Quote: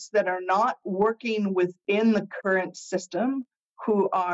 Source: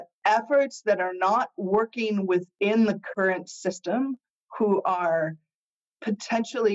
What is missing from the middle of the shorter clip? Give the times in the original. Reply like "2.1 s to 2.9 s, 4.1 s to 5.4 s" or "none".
none